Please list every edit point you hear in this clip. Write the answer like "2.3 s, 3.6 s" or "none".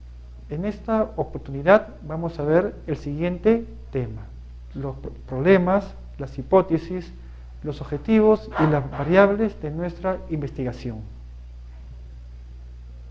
7.9 s